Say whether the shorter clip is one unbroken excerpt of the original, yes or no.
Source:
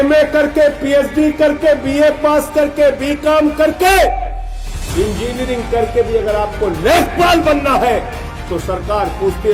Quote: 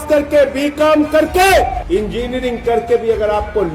no